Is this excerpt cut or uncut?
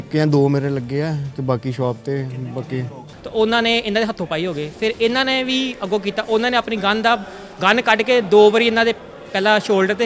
cut